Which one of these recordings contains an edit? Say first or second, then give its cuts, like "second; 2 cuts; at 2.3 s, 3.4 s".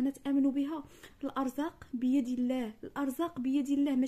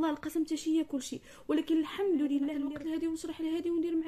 second; 1 cut; at 2.5 s